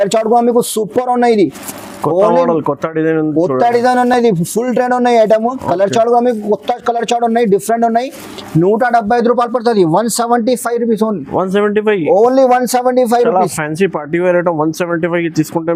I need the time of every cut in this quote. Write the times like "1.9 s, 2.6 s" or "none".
none